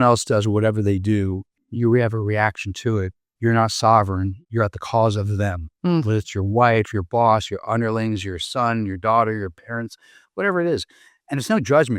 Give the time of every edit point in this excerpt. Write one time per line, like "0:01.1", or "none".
0:01.5
0:03.2
0:04.4